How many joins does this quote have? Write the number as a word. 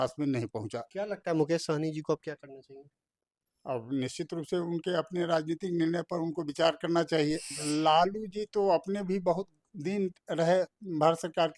one